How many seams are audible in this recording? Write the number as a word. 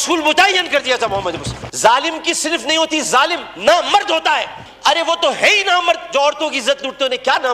two